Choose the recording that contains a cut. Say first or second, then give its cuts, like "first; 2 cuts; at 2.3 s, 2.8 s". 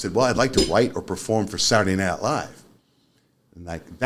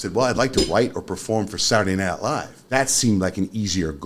second; 1 cut; at 2.6 s